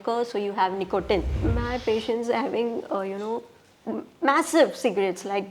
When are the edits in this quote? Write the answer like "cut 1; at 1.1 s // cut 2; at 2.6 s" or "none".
cut 1; at 1.3 s